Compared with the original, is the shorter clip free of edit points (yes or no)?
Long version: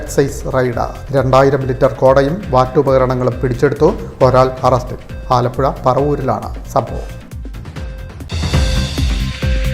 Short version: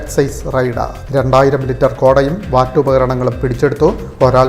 yes